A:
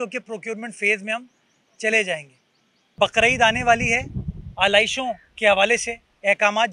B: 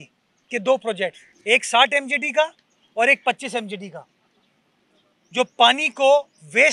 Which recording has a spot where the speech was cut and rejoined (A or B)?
A